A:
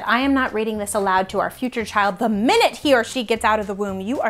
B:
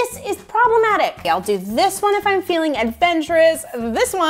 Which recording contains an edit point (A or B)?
B